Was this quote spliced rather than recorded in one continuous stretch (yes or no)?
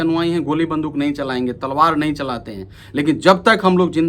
no